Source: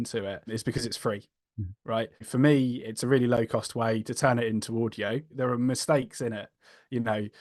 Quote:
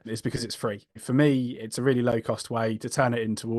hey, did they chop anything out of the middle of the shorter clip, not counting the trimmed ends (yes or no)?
yes